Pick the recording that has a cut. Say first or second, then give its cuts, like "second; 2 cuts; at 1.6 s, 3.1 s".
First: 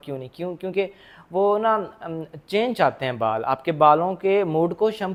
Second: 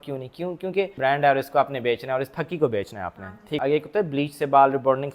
second; 2 cuts; at 1.0 s, 3.6 s